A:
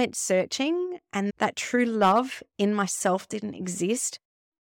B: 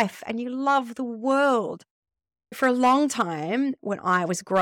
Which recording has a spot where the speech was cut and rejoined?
A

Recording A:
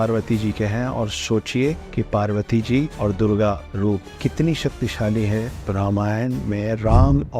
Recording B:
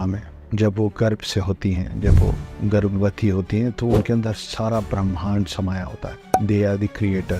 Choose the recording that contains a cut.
A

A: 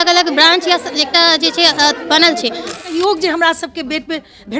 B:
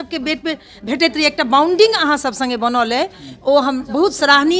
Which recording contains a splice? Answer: A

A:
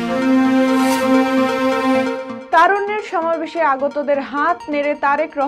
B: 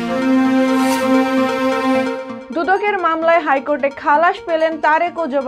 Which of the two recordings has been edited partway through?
B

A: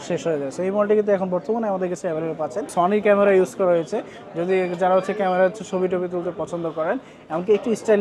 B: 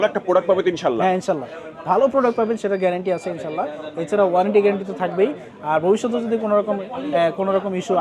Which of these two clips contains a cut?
A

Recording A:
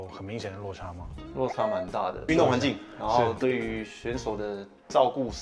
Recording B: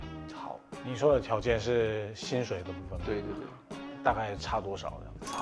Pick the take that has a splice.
A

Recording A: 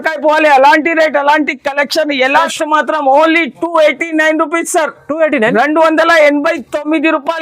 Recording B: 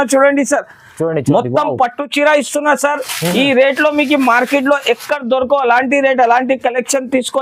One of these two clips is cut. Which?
A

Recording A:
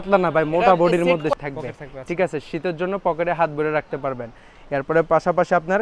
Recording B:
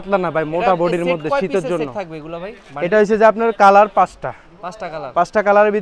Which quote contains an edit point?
A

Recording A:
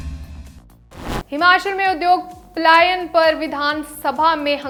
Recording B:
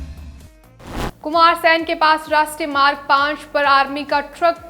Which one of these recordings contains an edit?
B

